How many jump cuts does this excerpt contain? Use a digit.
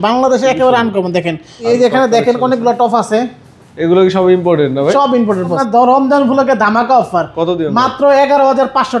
2